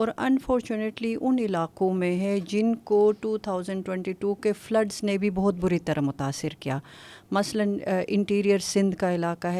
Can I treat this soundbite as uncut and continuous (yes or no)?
yes